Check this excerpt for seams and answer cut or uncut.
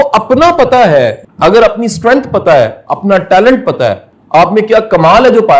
cut